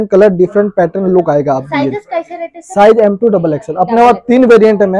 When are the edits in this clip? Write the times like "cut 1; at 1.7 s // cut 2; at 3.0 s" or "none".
none